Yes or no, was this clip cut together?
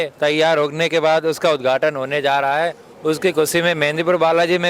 no